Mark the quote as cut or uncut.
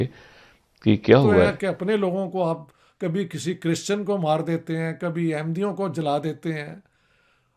uncut